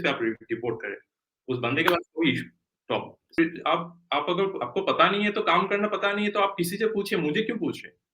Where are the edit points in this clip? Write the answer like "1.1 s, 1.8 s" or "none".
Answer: 3.3 s